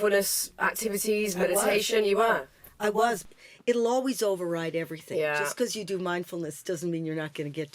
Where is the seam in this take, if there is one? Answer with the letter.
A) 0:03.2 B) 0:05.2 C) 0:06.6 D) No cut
A